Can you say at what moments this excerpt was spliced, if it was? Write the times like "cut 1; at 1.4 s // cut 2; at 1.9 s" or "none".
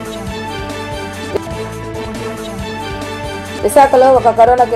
cut 1; at 1.3 s // cut 2; at 3.6 s